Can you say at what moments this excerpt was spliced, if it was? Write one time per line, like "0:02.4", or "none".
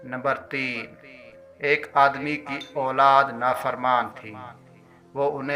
none